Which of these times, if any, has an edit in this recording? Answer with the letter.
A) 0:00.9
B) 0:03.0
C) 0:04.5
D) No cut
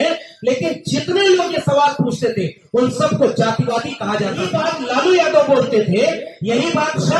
C